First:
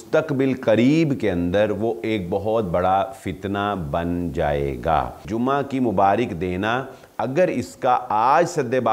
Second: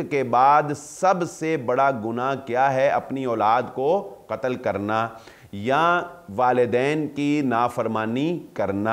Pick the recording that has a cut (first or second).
first